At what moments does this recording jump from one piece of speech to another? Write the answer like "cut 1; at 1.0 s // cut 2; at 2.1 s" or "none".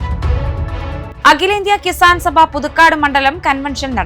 none